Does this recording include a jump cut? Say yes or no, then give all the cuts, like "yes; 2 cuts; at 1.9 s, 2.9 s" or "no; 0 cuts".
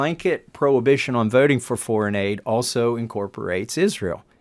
no; 0 cuts